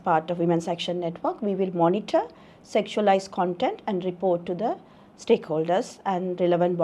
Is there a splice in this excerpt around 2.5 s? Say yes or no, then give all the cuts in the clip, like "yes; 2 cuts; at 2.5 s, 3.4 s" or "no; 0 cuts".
no; 0 cuts